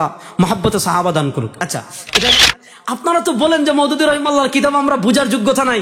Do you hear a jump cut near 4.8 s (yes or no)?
no